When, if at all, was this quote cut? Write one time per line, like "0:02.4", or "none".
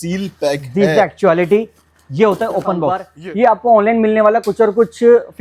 0:03.1